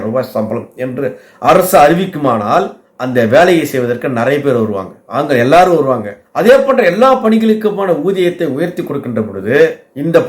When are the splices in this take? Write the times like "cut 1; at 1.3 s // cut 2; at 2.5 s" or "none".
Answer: none

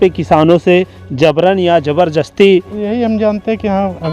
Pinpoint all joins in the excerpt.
cut 1; at 2.8 s

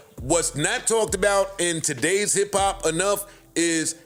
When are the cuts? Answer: none

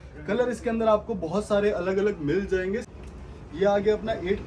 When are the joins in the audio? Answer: cut 1; at 2.9 s

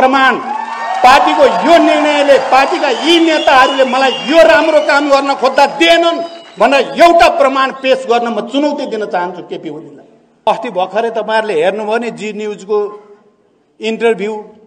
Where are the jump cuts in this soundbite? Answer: cut 1; at 10.5 s

